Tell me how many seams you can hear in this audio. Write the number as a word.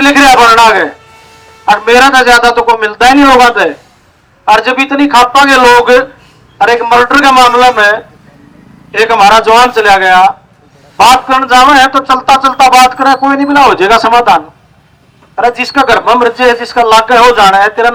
zero